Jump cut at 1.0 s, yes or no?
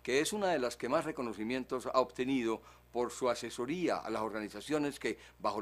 no